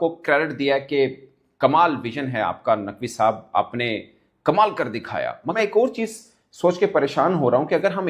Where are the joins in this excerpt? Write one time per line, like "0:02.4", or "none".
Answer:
0:05.6

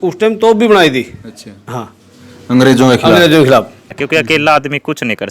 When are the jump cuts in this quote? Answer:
0:04.0

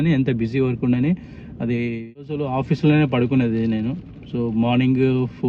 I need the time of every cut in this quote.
0:02.3

